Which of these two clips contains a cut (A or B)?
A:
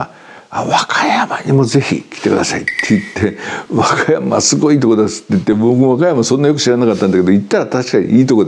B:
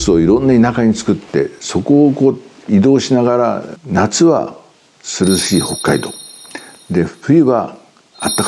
B